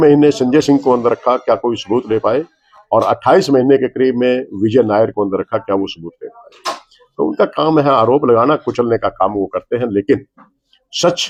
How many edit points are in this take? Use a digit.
0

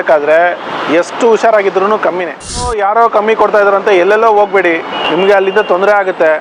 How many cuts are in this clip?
2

